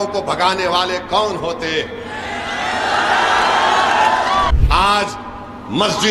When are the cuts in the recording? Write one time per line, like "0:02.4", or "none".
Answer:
0:04.5